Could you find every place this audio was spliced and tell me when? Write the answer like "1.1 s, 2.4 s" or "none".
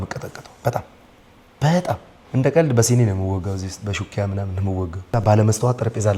2.1 s, 5.0 s